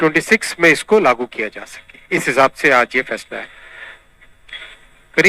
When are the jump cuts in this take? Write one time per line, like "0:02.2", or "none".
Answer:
none